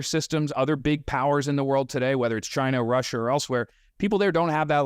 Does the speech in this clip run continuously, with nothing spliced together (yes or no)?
yes